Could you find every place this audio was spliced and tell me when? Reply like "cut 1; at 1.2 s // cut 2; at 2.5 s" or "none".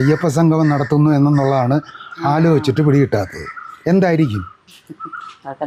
none